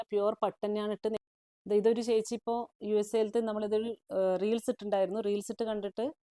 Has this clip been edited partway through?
yes; 1 cut; at 1.2 s

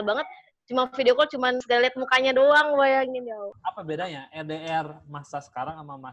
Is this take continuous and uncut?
no; 2 cuts; at 1.6 s, 3.5 s

